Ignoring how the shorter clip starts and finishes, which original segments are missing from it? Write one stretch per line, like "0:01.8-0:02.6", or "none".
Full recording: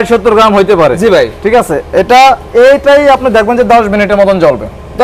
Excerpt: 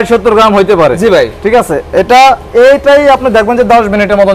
none